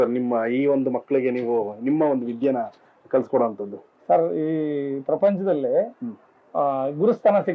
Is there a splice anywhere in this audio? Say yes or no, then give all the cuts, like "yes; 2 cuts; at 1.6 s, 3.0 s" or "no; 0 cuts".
no; 0 cuts